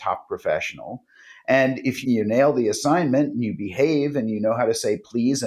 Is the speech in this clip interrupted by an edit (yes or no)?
yes